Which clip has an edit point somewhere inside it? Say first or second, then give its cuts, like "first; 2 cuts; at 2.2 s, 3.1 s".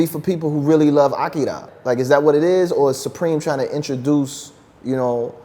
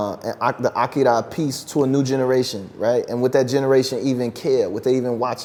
first; 1 cut; at 1.7 s